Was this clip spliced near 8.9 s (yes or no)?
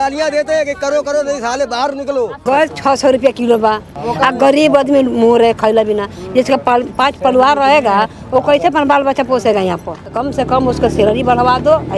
no